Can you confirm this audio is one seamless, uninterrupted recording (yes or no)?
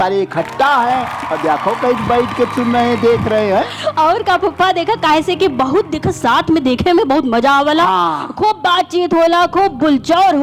yes